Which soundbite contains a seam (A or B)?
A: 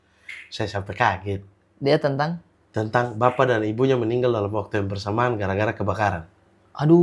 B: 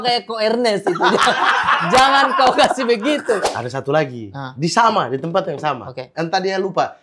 B